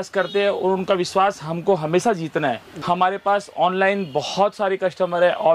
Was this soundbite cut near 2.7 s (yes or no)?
yes